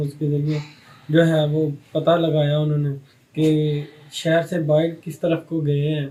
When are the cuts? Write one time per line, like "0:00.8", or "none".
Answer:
none